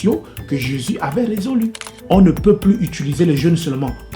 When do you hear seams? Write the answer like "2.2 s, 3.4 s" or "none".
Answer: 1.9 s